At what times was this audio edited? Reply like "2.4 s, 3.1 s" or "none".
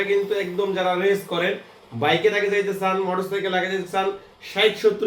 none